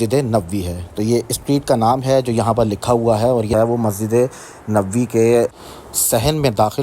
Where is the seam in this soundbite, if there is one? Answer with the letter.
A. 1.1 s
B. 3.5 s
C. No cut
B